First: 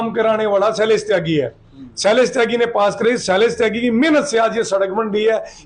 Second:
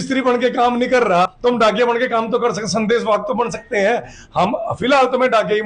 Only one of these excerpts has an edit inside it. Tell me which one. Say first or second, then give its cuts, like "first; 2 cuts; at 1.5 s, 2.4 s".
second; 1 cut; at 1.3 s